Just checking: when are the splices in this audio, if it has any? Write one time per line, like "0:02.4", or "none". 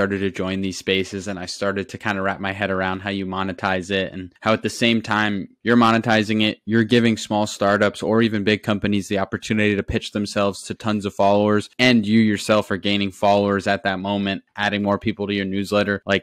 none